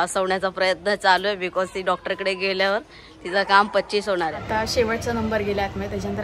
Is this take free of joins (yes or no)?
no